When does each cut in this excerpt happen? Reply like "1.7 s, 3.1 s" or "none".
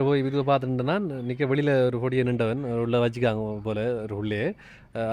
none